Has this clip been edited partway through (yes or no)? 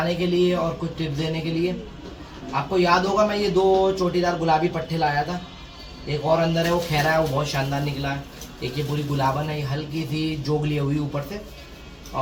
no